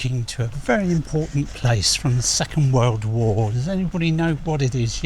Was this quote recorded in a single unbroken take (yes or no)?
yes